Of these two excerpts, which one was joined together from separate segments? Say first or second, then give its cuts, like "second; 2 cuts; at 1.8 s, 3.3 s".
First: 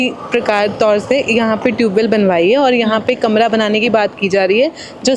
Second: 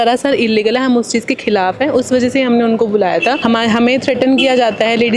second; 1 cut; at 3.4 s